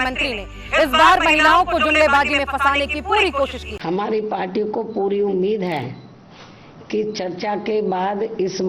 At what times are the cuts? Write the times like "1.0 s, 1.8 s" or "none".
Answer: 3.7 s